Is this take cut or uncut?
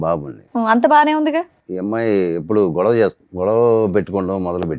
cut